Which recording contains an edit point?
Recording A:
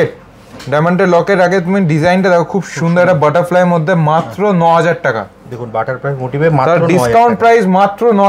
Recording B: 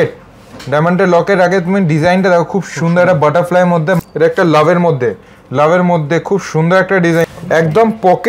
B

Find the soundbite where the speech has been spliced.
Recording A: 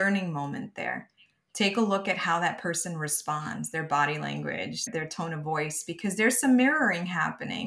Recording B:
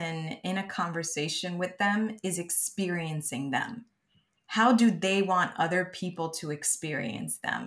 A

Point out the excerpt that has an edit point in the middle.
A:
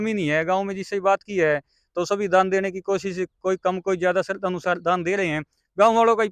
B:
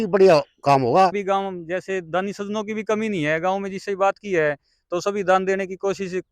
B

